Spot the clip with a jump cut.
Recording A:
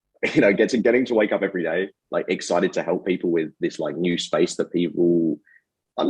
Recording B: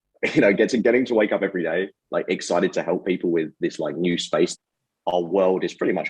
B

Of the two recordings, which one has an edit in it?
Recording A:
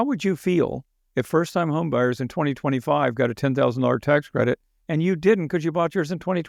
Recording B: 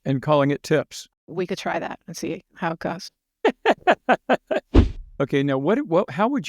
B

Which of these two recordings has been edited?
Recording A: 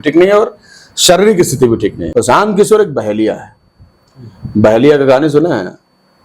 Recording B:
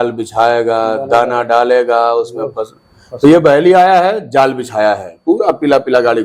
A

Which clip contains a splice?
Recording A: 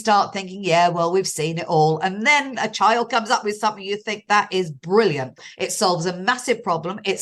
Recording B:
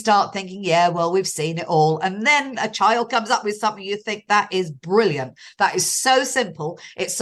A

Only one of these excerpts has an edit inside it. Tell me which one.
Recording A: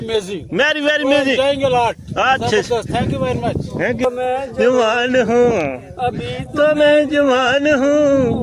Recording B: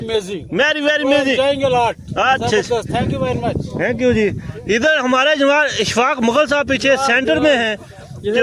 A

